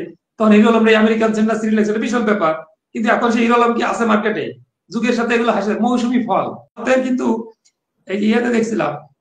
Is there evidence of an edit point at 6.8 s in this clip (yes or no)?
yes